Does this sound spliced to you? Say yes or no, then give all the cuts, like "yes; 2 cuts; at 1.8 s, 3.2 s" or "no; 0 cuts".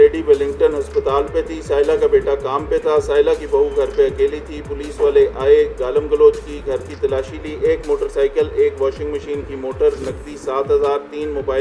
no; 0 cuts